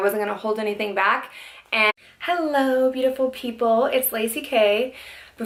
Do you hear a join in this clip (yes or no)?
no